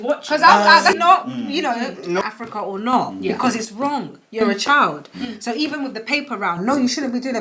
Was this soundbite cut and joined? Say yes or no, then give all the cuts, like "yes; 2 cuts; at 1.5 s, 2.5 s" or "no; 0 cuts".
yes; 2 cuts; at 0.9 s, 2.2 s